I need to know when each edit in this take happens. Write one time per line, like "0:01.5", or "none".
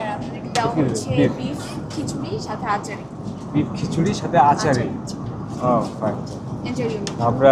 none